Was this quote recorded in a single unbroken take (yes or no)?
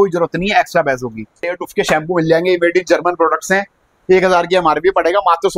no